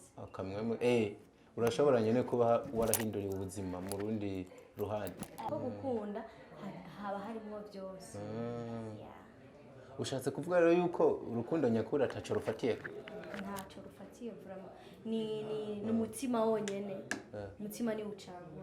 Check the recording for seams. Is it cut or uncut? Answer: cut